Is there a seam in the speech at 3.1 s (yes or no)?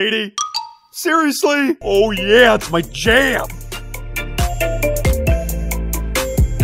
no